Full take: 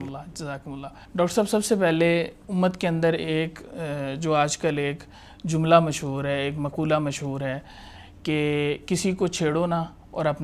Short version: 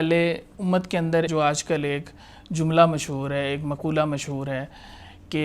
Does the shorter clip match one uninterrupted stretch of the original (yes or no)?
no